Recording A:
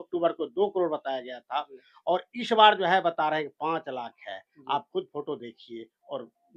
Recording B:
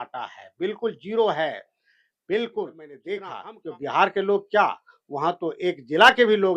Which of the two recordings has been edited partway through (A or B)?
B